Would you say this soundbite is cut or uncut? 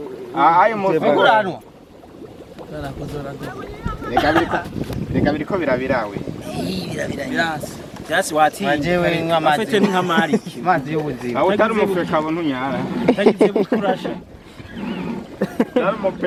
uncut